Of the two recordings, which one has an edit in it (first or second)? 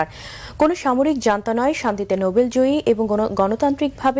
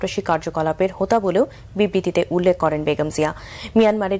first